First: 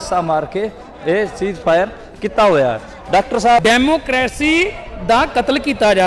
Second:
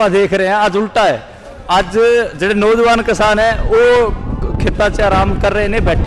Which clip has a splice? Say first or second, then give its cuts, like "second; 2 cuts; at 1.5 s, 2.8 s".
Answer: first; 1 cut; at 3.6 s